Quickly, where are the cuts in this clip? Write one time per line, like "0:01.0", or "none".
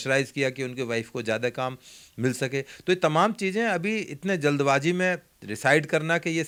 none

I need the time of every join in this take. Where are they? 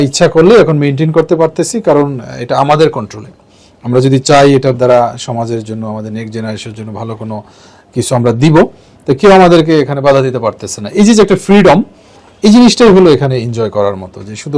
none

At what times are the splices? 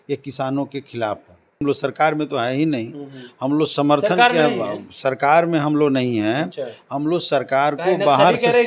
0:01.6

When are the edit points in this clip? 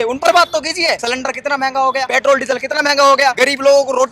0:01.0
0:02.1
0:03.4

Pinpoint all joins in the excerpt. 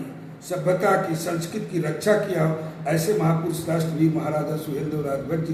none

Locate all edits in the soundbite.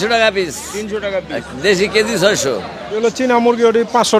0:03.1

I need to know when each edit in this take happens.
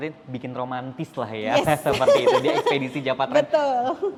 none

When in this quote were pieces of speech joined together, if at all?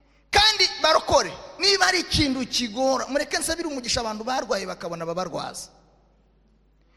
none

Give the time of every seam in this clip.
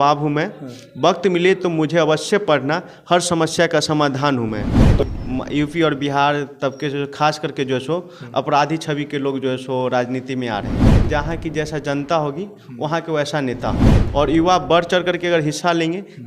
0:05.0
0:11.0
0:13.9

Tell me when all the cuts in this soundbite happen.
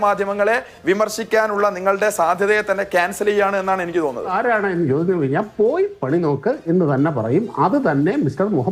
0:04.3

